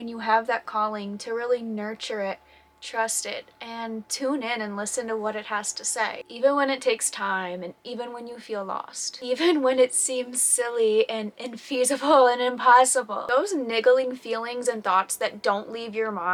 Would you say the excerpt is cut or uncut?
uncut